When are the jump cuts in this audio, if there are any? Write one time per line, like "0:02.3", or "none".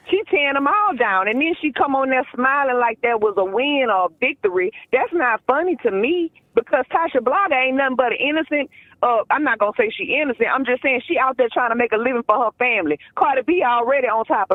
none